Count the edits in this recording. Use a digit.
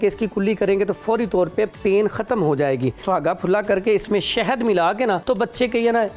2